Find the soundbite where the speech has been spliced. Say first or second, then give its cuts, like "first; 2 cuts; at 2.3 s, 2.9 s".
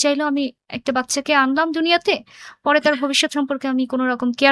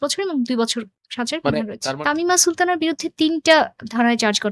second; 1 cut; at 1.9 s